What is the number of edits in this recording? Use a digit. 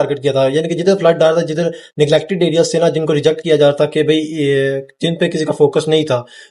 0